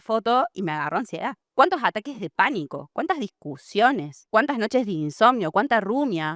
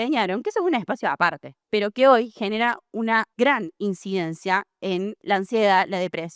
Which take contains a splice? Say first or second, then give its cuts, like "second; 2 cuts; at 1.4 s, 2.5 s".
second; 3 cuts; at 1.5 s, 3.3 s, 5.2 s